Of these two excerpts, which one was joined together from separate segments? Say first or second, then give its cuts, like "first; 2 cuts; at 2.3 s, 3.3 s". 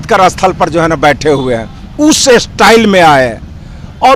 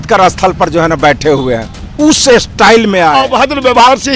second; 1 cut; at 3.2 s